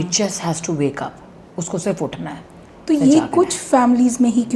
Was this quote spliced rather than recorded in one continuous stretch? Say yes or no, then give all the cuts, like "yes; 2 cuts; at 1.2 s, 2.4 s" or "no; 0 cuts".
no; 0 cuts